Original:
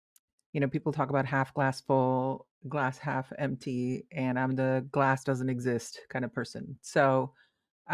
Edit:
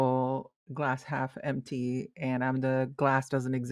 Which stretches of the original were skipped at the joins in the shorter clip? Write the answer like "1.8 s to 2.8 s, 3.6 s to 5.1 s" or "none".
none

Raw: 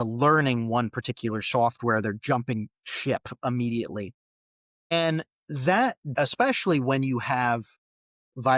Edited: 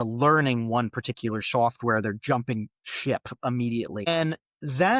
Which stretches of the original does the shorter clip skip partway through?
4.1 s to 4.9 s

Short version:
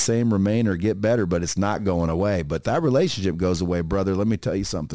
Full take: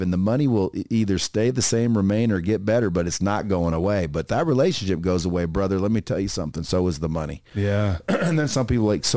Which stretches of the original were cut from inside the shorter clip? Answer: none

